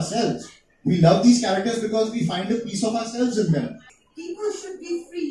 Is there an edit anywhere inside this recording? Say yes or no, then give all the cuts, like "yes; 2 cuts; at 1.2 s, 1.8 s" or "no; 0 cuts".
yes; 1 cut; at 3.8 s